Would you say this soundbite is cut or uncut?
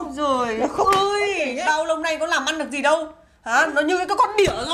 uncut